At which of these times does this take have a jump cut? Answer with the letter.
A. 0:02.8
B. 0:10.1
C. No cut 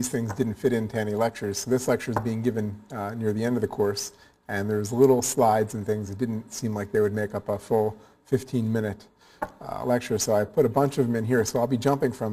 B